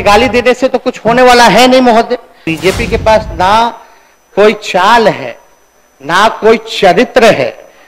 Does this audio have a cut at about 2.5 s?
yes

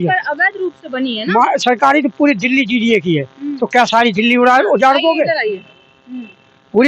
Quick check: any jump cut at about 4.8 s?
no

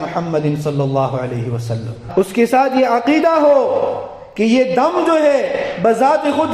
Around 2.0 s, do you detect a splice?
yes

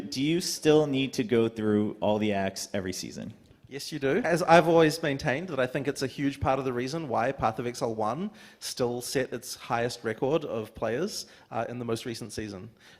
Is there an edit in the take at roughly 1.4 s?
no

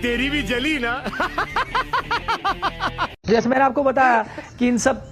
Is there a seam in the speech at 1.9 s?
no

